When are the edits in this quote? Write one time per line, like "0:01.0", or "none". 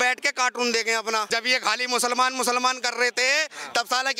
0:01.3